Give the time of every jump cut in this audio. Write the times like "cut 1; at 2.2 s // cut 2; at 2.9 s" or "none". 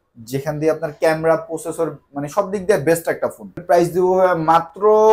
cut 1; at 3.6 s